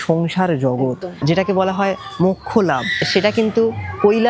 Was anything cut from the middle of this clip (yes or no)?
yes